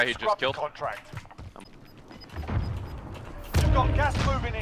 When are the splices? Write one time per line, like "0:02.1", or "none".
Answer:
0:01.5